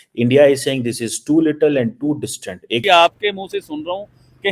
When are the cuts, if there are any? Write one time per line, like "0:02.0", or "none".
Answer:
0:02.8